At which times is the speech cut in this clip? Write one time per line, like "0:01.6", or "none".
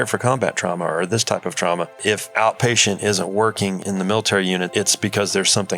0:02.0
0:03.8
0:04.7